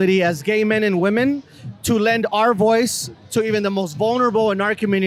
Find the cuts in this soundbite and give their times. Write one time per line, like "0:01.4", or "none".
none